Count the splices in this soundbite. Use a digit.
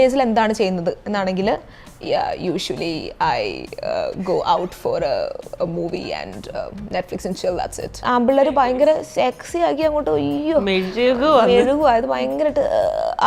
1